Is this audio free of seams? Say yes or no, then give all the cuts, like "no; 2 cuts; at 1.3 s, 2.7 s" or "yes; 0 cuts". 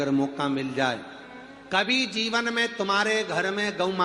no; 1 cut; at 2.3 s